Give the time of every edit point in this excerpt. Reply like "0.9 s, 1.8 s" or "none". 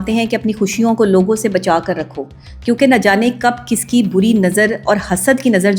none